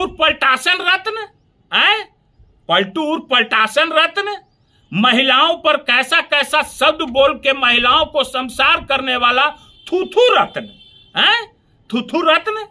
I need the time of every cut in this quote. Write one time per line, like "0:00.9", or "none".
none